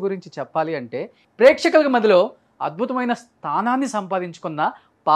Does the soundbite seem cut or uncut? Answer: cut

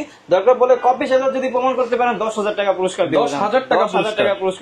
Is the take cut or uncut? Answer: uncut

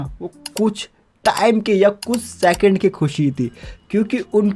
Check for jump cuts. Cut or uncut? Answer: uncut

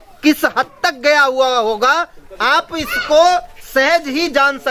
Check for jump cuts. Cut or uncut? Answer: uncut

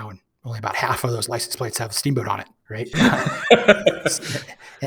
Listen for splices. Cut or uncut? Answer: cut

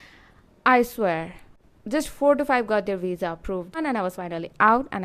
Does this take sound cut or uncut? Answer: cut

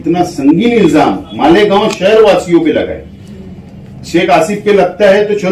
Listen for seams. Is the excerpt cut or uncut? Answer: uncut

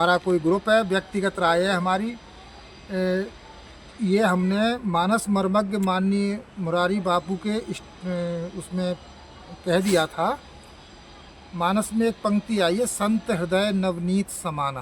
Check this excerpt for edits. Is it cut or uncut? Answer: uncut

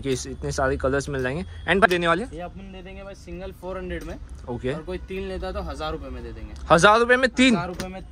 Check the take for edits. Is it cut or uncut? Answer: cut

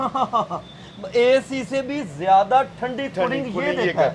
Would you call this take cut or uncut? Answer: uncut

